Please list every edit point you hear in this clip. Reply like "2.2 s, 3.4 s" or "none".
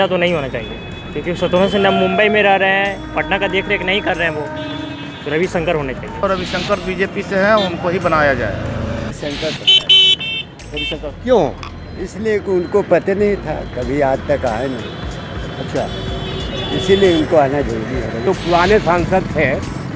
6.2 s, 9.1 s, 18.3 s